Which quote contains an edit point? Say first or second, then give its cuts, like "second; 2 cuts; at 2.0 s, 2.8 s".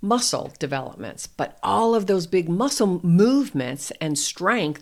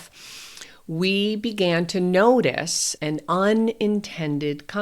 second; 1 cut; at 3.0 s